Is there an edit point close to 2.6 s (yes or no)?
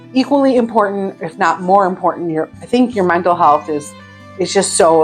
no